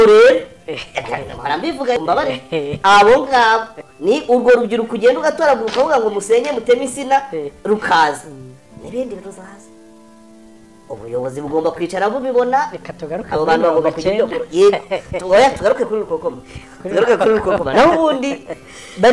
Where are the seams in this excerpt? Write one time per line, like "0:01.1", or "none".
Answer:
0:02.0